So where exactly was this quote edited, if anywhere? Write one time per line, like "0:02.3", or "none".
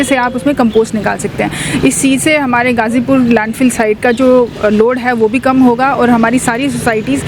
none